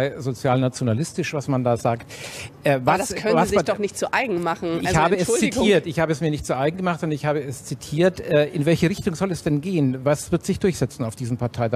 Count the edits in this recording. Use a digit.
1